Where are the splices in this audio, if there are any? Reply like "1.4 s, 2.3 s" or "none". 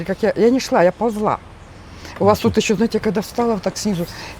none